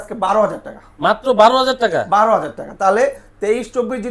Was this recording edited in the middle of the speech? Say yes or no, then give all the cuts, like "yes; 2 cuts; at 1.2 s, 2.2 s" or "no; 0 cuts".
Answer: no; 0 cuts